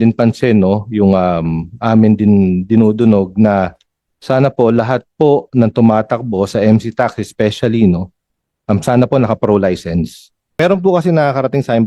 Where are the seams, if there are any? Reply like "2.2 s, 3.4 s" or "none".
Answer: 10.5 s